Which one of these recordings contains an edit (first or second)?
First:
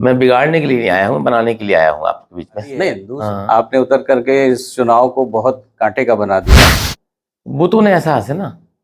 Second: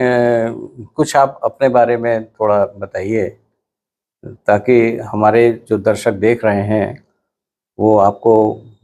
first